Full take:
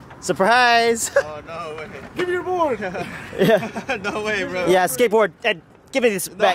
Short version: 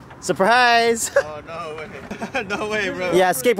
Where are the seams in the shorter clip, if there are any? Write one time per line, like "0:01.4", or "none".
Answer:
0:02.1

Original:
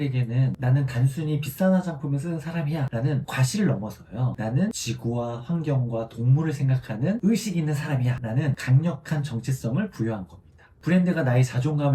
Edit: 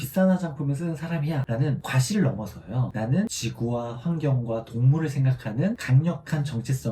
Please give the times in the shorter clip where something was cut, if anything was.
0:05.8

